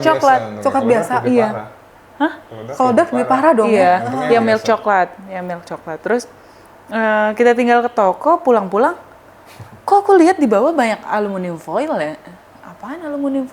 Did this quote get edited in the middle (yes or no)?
no